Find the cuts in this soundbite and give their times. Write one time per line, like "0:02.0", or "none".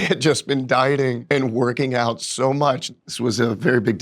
0:01.2
0:02.8